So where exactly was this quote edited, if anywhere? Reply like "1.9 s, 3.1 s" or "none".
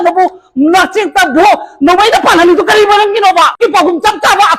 3.6 s